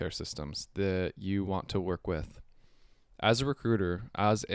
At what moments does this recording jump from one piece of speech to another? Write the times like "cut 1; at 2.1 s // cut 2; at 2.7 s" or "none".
none